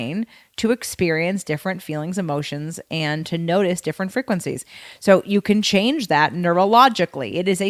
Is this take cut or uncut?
uncut